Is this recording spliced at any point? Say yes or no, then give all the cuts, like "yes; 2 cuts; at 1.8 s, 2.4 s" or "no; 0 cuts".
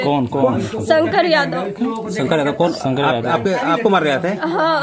no; 0 cuts